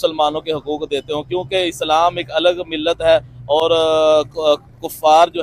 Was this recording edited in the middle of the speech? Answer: no; 0 cuts

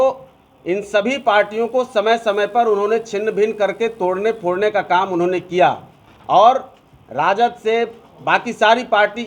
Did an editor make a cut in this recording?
no; 0 cuts

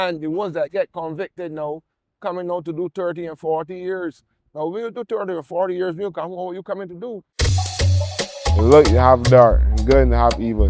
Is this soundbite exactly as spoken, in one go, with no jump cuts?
no; 1 cut; at 7.3 s

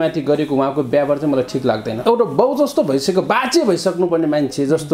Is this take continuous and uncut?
no; 1 cut; at 2.0 s

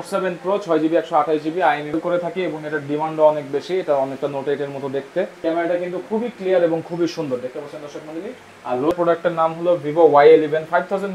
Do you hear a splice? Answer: yes; 3 cuts; at 1.9 s, 5.3 s, 8.9 s

